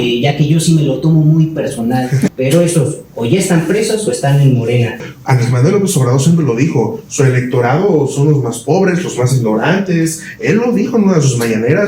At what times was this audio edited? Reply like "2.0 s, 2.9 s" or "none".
2.3 s, 5.1 s